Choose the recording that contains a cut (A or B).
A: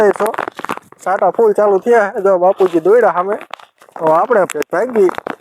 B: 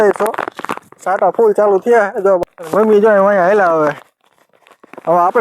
B